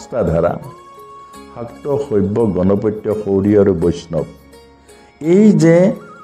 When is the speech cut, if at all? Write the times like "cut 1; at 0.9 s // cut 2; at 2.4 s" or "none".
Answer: none